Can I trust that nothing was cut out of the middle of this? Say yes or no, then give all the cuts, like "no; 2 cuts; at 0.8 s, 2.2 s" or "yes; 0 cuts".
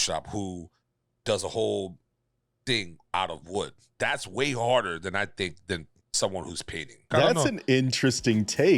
no; 1 cut; at 7.1 s